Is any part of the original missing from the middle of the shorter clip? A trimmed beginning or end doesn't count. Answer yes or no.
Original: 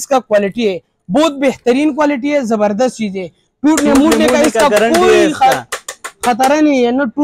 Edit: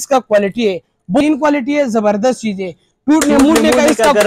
yes